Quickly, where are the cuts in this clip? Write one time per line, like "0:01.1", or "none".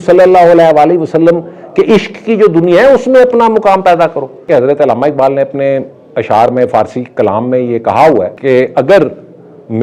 0:04.5
0:08.3